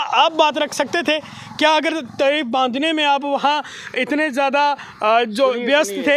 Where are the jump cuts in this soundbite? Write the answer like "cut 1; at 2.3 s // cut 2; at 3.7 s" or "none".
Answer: none